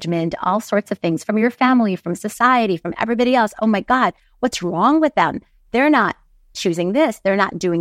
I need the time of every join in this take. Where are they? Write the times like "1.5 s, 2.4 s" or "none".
none